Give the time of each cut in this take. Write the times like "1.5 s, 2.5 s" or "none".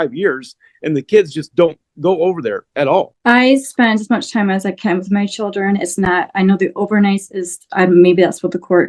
3.1 s